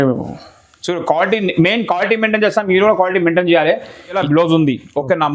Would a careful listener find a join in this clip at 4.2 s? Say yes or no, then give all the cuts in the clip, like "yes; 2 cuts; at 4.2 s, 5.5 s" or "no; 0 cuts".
yes; 1 cut; at 4.2 s